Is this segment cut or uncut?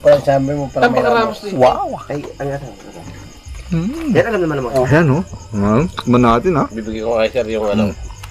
cut